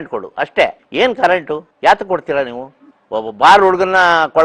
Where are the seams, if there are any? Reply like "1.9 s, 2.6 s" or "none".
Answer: 1.2 s